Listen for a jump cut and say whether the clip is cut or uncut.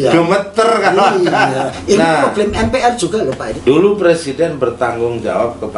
cut